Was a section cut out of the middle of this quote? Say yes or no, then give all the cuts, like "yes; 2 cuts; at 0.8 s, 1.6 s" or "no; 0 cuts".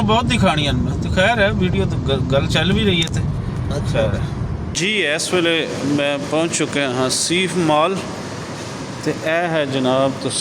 yes; 1 cut; at 4.8 s